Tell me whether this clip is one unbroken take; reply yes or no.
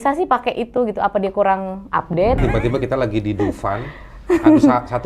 no